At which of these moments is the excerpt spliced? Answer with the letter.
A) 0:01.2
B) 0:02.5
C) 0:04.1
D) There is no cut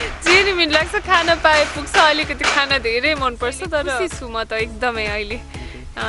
C